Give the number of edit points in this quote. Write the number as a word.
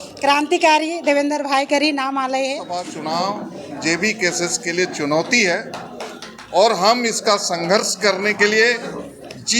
one